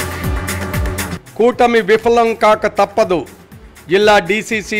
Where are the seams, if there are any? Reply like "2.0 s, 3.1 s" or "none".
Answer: 1.1 s